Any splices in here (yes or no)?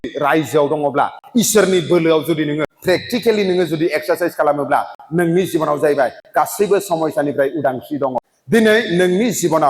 yes